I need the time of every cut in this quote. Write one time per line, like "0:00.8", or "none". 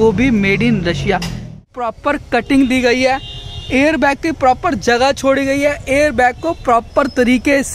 0:01.7

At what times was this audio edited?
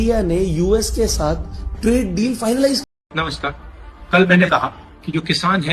0:02.8

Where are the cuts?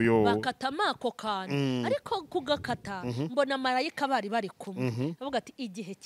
none

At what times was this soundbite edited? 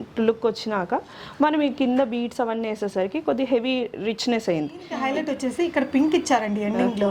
0:04.9

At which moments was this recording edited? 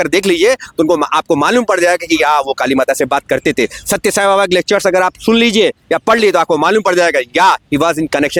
none

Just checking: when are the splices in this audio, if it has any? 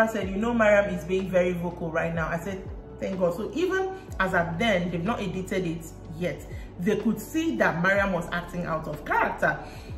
none

